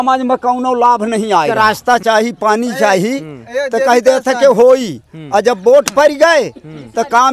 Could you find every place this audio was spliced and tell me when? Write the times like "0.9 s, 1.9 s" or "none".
1.5 s